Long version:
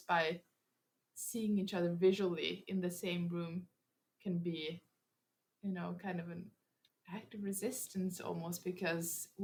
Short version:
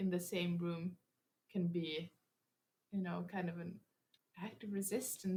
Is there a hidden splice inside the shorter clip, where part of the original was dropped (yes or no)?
no